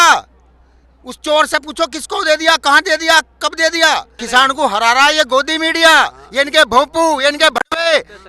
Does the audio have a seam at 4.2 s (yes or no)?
yes